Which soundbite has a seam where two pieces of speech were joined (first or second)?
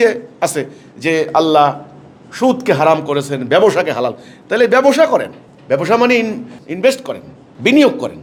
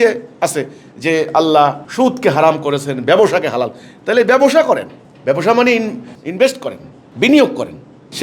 second